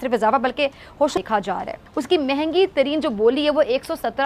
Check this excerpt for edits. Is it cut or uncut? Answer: cut